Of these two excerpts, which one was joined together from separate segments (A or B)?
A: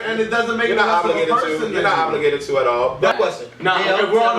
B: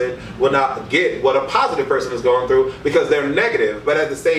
A